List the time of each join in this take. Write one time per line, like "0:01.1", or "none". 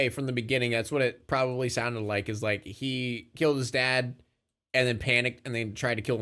none